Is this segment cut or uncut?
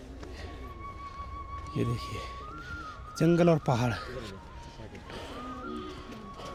uncut